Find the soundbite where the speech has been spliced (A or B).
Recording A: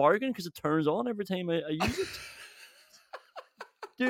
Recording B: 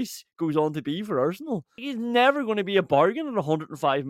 B